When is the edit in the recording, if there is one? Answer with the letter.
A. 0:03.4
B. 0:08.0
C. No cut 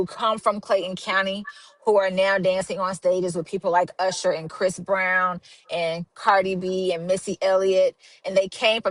C